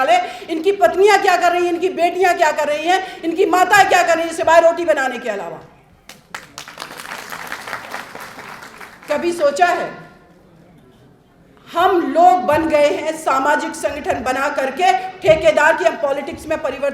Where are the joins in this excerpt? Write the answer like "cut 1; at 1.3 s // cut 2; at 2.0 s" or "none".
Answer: none